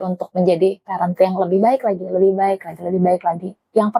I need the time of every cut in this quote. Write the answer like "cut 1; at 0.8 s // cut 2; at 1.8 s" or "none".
none